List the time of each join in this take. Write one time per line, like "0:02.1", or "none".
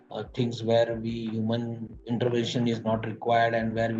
none